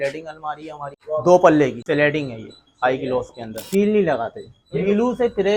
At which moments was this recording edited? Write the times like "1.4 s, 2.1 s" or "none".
0.9 s, 1.8 s, 3.6 s, 4.8 s